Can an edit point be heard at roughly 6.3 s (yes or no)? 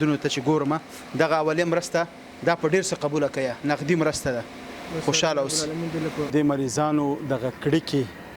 yes